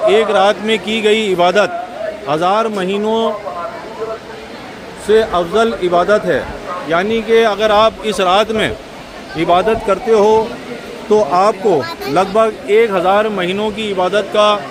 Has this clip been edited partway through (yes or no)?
no